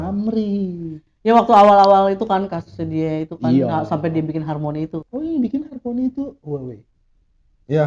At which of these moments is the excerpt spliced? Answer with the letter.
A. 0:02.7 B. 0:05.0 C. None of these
B